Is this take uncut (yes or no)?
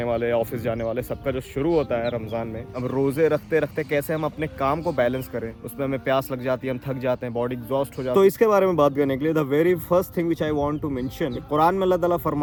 yes